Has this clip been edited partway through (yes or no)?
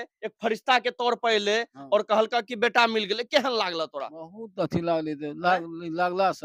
no